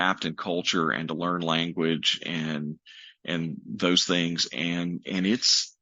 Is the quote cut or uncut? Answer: uncut